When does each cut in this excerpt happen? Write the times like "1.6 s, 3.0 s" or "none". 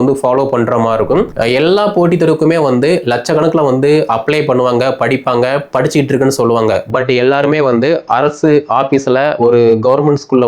1.3 s